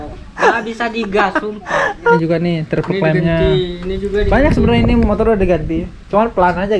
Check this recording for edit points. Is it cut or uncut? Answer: cut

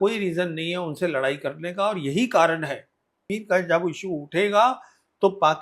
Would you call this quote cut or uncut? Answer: cut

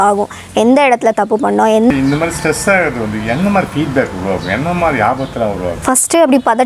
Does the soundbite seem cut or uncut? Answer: cut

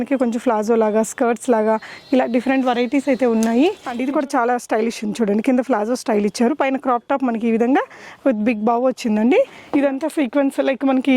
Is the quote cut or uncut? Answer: cut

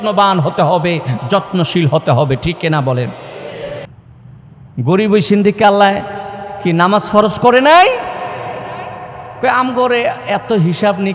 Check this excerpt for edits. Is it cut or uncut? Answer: cut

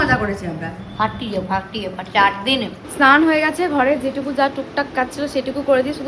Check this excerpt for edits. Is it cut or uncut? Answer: cut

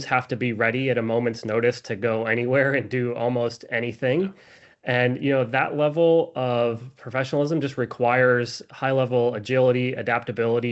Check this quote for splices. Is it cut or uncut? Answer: uncut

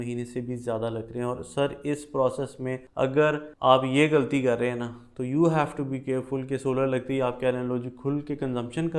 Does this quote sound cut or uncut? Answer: cut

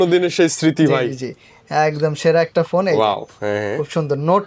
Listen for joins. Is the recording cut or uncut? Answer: uncut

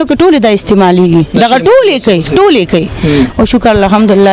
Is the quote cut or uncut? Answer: cut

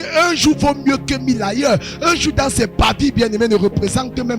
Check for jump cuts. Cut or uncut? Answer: uncut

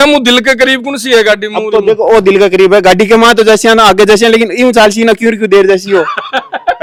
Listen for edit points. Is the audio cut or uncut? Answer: uncut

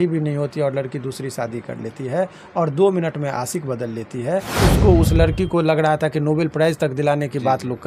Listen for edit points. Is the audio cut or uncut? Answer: cut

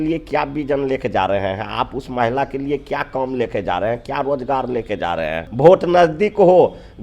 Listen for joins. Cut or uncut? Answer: cut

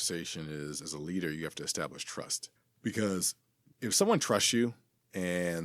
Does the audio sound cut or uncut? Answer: cut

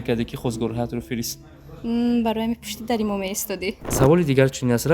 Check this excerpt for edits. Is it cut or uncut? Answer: cut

